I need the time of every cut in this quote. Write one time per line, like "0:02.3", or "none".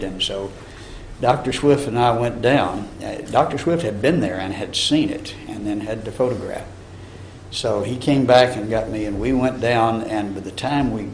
0:01.1